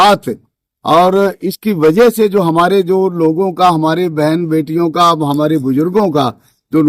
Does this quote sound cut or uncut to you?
uncut